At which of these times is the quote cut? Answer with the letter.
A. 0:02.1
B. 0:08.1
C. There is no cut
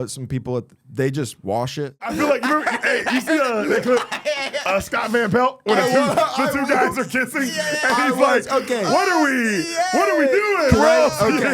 A